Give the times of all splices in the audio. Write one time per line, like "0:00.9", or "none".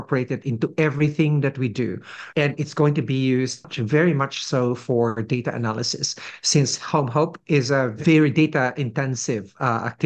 0:02.2
0:03.7
0:08.0